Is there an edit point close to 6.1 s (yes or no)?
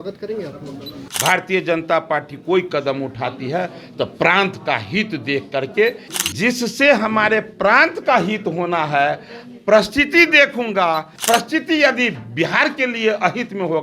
yes